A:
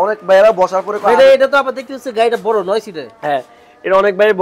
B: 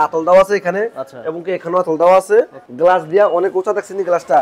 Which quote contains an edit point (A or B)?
B